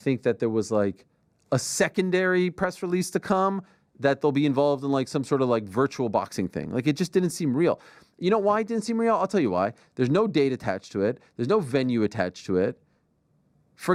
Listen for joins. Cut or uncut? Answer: uncut